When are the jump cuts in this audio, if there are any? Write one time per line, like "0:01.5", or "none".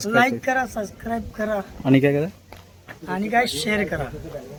none